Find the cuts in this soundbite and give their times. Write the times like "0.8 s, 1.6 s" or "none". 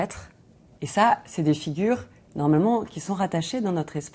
none